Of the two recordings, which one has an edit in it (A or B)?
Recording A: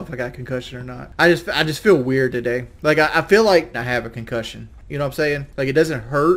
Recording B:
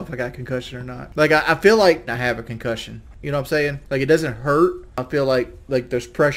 B